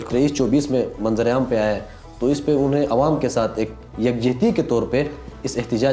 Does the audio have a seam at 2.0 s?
no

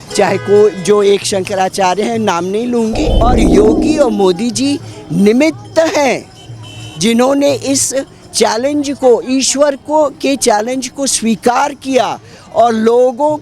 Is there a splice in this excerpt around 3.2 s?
yes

